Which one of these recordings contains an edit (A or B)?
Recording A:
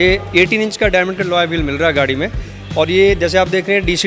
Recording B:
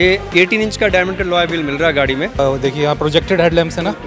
B